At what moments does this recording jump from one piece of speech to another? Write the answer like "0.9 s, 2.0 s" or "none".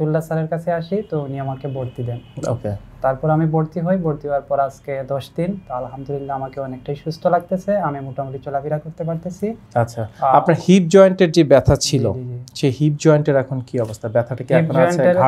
none

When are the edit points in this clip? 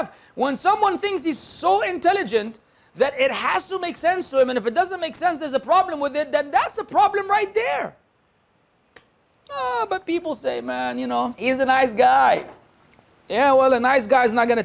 11.4 s

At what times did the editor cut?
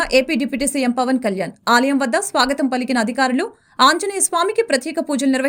none

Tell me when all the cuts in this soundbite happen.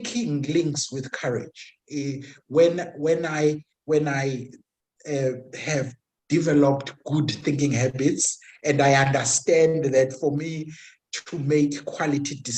none

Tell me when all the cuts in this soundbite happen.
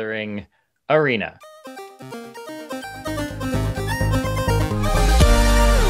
1.5 s

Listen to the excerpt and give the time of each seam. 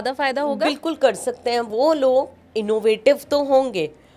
1.7 s

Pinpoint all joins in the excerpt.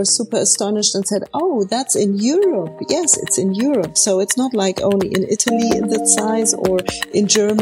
none

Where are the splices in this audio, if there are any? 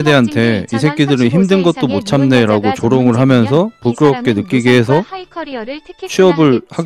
none

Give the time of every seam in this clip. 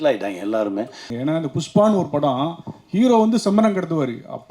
1.1 s

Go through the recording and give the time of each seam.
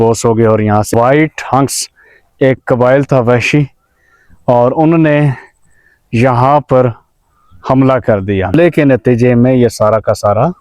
0.9 s, 8.5 s

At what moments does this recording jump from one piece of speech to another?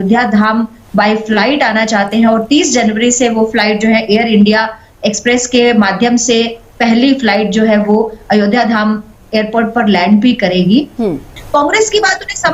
11.3 s

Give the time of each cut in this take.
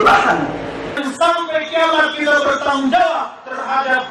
1.0 s

